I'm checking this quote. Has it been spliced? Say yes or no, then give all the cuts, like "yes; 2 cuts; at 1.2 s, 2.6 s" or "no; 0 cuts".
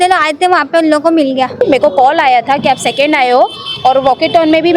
yes; 1 cut; at 1.6 s